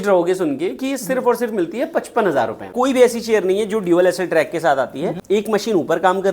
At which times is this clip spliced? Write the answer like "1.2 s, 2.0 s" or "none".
2.7 s, 5.2 s